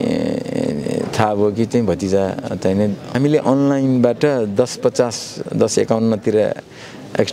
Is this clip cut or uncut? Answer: cut